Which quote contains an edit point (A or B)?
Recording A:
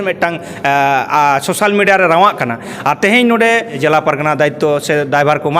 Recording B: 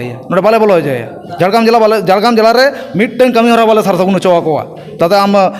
A